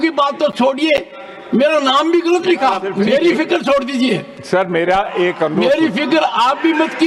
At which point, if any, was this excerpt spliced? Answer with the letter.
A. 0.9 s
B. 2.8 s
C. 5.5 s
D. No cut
B